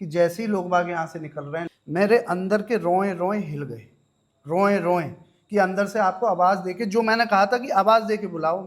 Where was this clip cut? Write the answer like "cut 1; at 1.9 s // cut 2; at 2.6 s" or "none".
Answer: cut 1; at 1.7 s